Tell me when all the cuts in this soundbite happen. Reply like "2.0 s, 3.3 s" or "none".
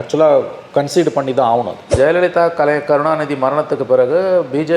1.9 s